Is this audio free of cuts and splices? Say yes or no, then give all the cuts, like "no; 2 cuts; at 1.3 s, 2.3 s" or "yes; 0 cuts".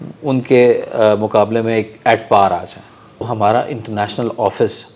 no; 1 cut; at 3.3 s